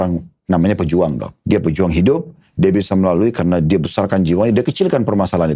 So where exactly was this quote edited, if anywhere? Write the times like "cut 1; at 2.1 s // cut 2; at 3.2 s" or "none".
cut 1; at 1.3 s